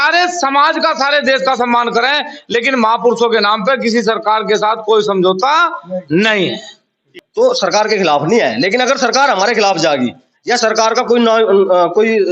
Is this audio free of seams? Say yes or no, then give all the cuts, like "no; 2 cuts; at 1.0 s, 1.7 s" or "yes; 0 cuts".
no; 1 cut; at 7.0 s